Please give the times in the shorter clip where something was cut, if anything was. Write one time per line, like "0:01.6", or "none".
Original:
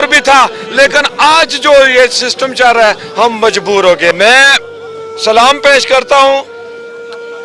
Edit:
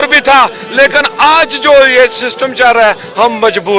none